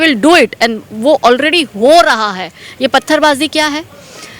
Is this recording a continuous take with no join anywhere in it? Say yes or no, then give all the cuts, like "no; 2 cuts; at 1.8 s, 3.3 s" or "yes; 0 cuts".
yes; 0 cuts